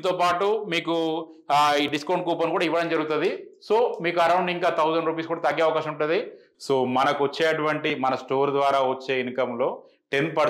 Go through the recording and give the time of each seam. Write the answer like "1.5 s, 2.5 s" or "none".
6.4 s